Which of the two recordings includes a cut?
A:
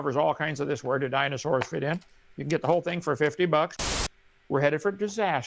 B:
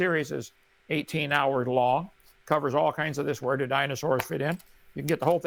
A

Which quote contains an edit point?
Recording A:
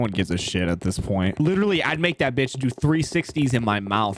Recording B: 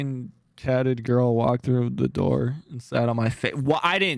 A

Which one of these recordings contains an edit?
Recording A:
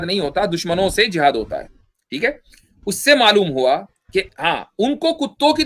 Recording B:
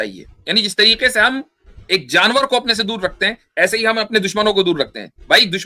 A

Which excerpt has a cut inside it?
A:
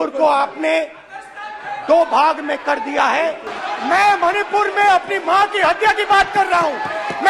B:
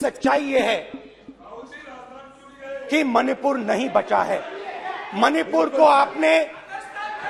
A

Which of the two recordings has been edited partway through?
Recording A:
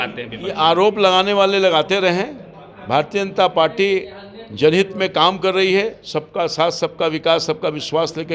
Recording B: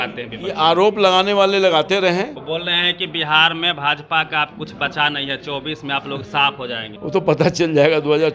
B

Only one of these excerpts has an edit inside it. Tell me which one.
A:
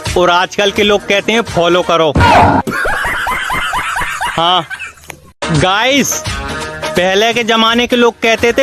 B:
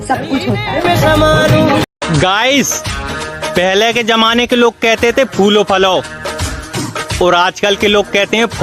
B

